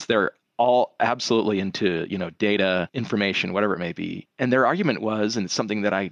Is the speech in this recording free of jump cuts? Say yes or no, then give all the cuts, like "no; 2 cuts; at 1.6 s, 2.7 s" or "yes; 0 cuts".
no; 2 cuts; at 2.9 s, 4.2 s